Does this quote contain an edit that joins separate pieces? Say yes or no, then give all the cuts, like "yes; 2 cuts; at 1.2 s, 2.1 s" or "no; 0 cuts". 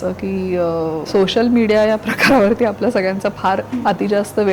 yes; 2 cuts; at 1.0 s, 3.7 s